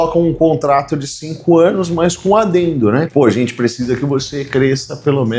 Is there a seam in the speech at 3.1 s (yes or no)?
yes